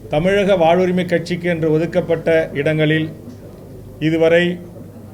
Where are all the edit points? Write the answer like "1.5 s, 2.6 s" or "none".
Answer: none